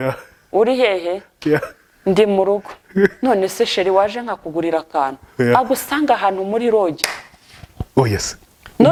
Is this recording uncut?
yes; 0 cuts

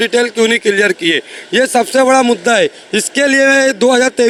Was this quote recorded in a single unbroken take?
yes; 0 cuts

